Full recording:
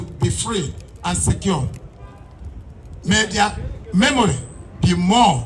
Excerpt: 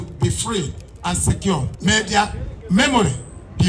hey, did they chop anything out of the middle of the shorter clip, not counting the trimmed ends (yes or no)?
yes